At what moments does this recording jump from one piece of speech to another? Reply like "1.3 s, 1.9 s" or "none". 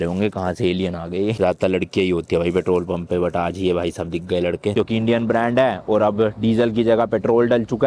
1.4 s, 4.7 s